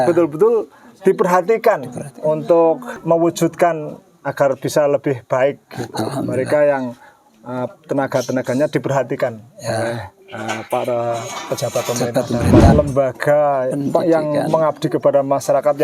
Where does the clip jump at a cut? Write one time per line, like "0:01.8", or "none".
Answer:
0:02.9
0:12.7